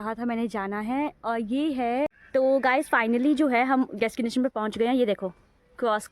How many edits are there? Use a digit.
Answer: 1